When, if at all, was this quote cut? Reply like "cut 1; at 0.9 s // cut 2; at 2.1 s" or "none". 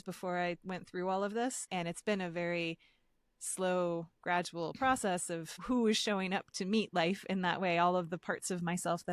cut 1; at 1.6 s // cut 2; at 5.6 s